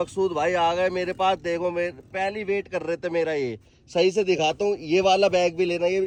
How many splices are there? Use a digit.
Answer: 0